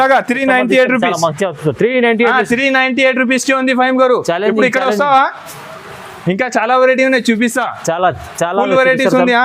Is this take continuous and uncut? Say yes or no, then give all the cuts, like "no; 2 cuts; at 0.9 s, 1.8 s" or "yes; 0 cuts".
yes; 0 cuts